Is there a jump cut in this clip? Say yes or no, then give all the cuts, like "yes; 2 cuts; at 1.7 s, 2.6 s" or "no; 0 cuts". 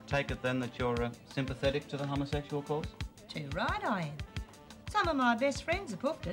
no; 0 cuts